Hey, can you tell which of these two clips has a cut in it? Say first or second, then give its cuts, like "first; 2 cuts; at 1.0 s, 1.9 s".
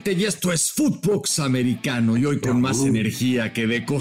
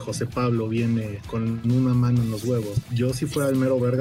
second; 1 cut; at 2.8 s